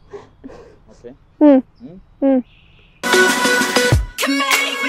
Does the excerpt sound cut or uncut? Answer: uncut